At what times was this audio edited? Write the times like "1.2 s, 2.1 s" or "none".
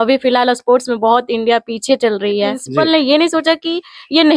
2.7 s

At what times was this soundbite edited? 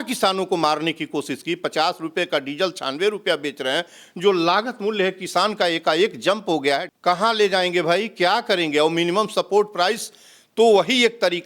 6.9 s

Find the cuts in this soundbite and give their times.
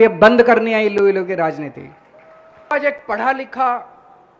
2.7 s

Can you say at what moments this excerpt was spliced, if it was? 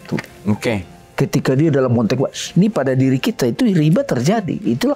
none

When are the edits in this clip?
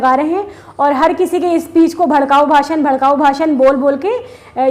none

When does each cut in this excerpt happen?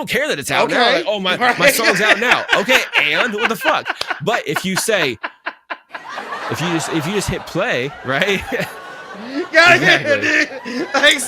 none

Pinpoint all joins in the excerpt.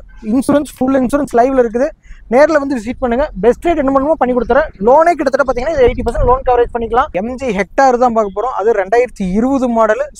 7.1 s

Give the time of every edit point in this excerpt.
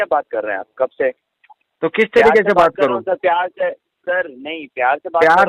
none

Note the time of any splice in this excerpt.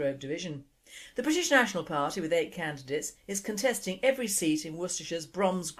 none

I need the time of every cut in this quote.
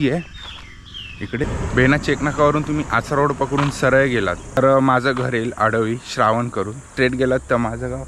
1.5 s, 4.6 s, 6.8 s

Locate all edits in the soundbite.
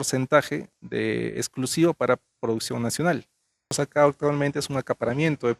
3.8 s

